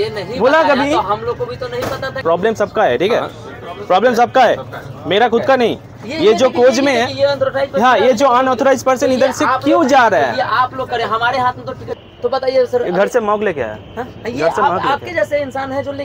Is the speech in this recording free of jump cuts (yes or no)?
no